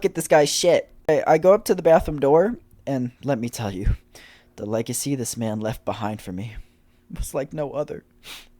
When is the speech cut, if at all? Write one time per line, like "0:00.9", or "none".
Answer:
0:01.1